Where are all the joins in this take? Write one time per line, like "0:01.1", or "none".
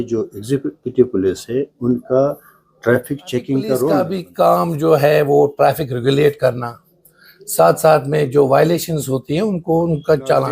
0:04.2